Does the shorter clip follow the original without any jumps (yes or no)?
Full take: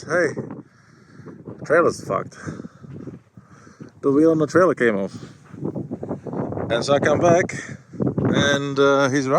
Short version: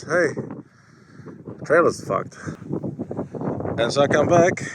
no